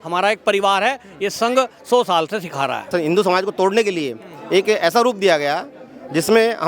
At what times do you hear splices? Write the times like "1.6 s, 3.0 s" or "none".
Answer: 2.9 s